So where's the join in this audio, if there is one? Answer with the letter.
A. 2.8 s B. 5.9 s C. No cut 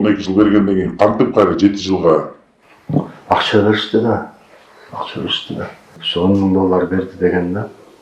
B